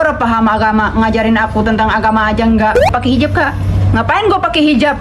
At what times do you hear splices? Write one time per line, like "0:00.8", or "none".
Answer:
0:02.9